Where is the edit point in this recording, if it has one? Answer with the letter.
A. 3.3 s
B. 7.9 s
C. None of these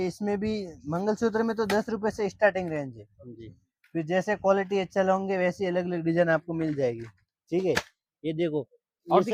C